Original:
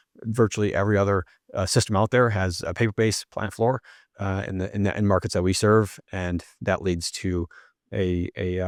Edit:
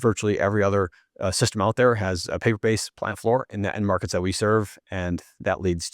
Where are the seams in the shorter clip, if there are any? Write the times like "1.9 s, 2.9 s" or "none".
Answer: 3.5 s